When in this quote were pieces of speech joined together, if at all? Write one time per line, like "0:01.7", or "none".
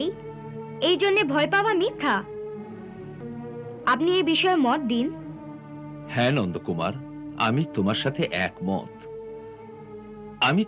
0:03.3